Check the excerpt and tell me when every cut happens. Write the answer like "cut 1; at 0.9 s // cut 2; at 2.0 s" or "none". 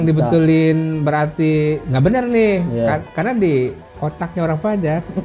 none